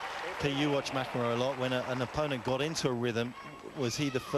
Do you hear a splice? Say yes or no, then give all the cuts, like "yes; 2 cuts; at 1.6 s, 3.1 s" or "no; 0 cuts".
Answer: no; 0 cuts